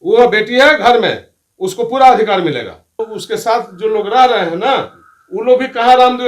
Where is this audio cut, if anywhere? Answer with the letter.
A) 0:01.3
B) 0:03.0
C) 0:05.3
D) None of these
B